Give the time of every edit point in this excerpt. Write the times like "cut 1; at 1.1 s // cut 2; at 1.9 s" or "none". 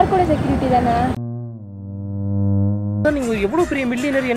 cut 1; at 3.0 s